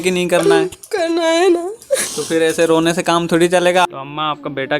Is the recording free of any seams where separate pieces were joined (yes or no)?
no